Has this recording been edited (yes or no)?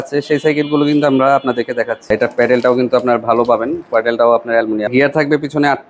yes